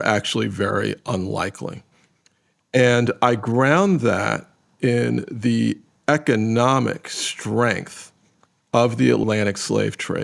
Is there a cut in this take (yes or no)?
yes